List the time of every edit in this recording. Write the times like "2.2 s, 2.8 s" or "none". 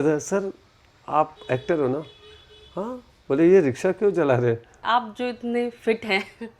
4.7 s